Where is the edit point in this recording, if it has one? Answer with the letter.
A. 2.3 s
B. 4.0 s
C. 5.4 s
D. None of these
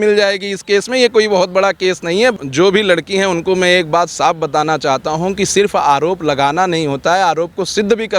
A